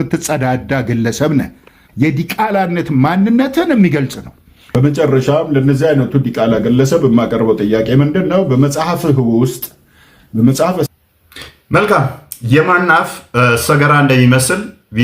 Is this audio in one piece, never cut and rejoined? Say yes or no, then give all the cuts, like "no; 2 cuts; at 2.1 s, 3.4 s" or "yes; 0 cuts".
yes; 0 cuts